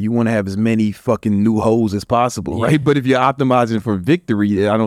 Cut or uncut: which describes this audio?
cut